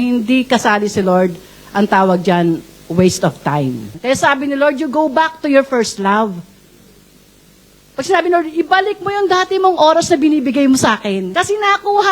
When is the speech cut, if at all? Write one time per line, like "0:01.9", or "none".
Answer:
0:03.9
0:11.3